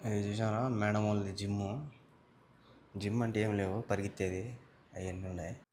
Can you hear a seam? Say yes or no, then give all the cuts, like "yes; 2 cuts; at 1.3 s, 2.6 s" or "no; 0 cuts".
no; 0 cuts